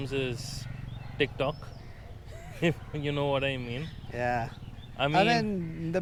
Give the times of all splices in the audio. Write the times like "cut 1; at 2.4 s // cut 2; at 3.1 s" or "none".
none